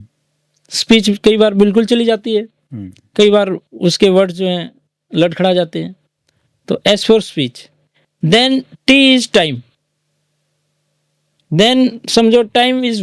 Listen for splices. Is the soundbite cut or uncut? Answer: uncut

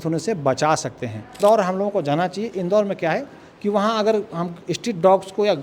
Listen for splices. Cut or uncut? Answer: cut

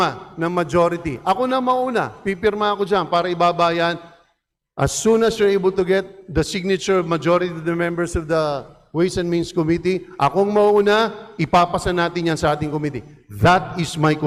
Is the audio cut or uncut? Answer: uncut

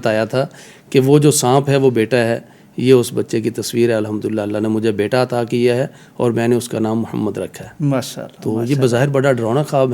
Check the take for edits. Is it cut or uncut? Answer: uncut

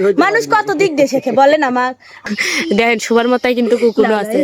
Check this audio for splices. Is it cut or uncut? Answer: cut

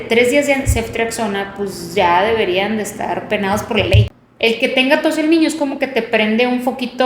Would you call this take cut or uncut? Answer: cut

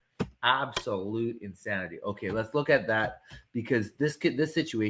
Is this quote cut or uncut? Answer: uncut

